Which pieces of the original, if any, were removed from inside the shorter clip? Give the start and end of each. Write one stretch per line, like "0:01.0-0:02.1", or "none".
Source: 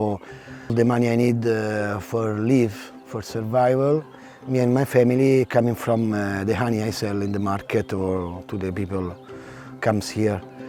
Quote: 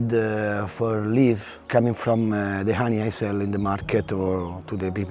0:03.0-0:05.5